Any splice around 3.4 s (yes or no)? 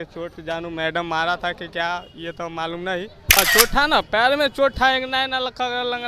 yes